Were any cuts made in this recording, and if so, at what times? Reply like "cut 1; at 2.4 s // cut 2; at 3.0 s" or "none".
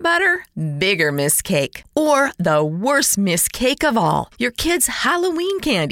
none